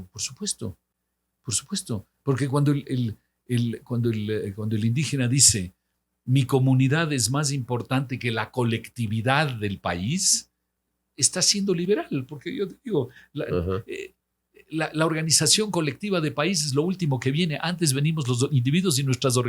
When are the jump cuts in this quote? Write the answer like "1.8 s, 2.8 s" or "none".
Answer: none